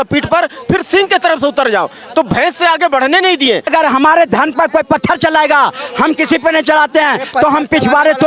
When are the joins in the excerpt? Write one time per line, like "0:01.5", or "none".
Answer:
0:03.7